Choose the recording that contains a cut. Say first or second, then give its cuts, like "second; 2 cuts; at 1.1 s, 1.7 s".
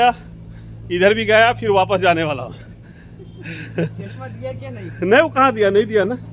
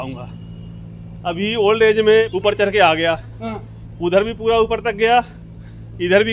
second; 1 cut; at 2.3 s